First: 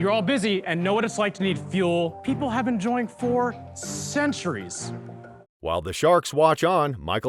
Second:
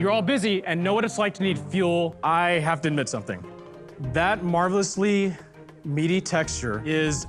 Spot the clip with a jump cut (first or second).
second